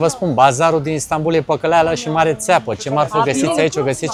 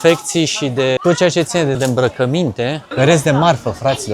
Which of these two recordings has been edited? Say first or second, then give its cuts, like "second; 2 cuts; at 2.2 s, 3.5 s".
second; 3 cuts; at 1.0 s, 1.8 s, 2.8 s